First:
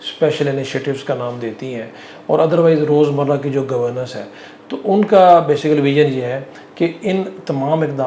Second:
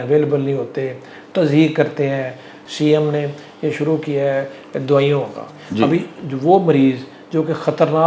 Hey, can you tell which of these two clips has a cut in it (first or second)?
second